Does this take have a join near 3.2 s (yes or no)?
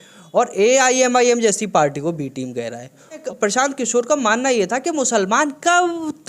yes